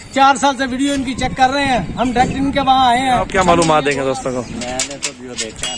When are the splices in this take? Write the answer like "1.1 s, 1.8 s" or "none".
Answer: 3.3 s